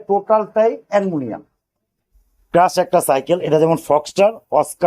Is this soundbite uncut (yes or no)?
no